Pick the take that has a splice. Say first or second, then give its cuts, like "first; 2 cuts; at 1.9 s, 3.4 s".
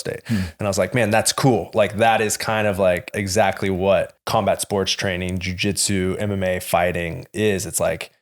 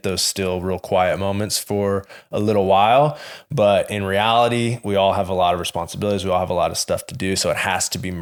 first; 2 cuts; at 3.2 s, 4.2 s